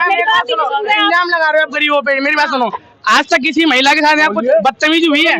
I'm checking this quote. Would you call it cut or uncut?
uncut